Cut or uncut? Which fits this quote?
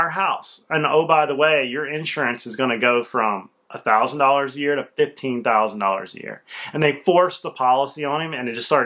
uncut